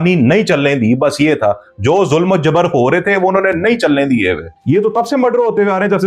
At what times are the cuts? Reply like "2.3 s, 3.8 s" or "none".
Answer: 4.5 s